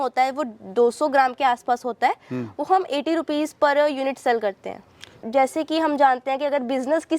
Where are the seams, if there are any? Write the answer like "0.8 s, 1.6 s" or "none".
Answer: 5.2 s